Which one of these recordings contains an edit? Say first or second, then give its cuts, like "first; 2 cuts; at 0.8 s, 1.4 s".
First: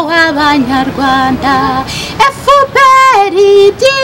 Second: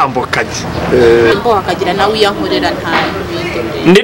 second; 1 cut; at 1.3 s